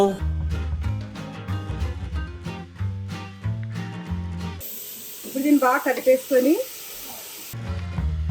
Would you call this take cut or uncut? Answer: uncut